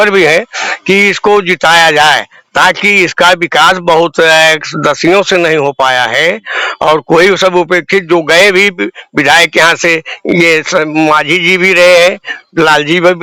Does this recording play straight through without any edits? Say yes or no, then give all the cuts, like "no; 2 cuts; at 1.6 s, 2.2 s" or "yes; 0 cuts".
yes; 0 cuts